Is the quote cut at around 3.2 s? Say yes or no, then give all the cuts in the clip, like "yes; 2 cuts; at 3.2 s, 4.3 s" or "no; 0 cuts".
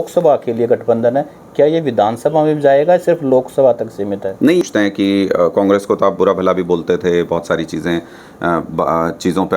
no; 1 cut; at 4.6 s